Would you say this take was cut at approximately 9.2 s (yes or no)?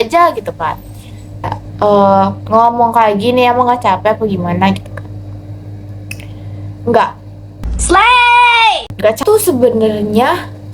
yes